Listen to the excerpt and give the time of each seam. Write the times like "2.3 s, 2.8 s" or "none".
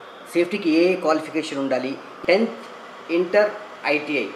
2.1 s